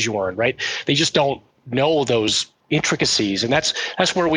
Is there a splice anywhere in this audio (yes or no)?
yes